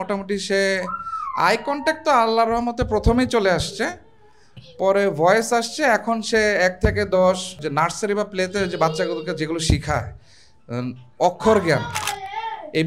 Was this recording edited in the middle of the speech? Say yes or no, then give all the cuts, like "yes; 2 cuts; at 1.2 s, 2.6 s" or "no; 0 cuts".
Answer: no; 0 cuts